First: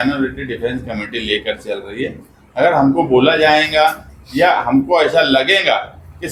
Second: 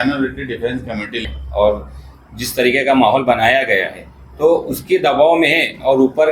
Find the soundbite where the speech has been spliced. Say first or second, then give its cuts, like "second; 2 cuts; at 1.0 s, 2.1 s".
second; 1 cut; at 1.2 s